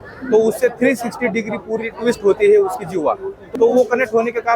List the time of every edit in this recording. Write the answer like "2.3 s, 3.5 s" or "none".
3.3 s